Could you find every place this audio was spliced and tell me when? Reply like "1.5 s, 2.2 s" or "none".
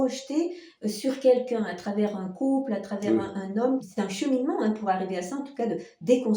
3.8 s